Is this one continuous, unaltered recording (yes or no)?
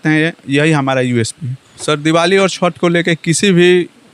no